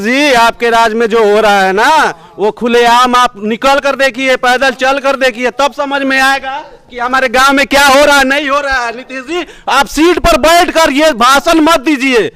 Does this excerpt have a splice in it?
no; 0 cuts

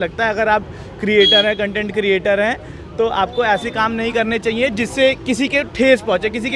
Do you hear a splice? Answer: no; 0 cuts

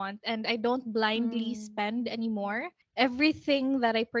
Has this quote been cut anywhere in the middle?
yes; 1 cut; at 2.8 s

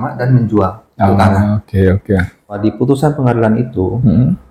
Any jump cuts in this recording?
yes; 1 cut; at 2.6 s

